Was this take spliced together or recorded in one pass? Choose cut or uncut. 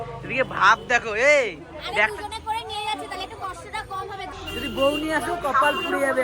cut